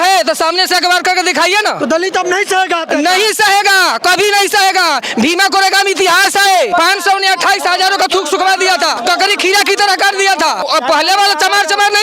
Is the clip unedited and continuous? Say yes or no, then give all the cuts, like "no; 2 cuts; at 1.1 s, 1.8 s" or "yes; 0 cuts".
no; 3 cuts; at 6.7 s, 9.0 s, 10.6 s